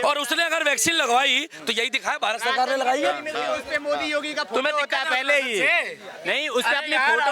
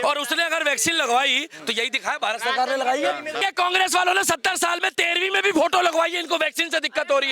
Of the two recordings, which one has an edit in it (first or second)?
second